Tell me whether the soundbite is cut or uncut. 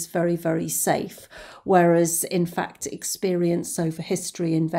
uncut